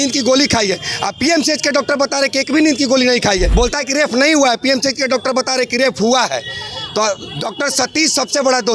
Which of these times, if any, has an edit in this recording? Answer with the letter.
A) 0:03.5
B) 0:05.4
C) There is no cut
A